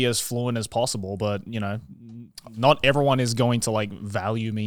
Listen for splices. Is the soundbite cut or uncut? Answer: uncut